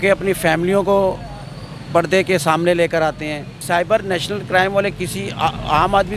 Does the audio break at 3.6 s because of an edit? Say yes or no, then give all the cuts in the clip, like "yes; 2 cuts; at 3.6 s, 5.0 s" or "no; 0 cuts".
yes; 1 cut; at 3.6 s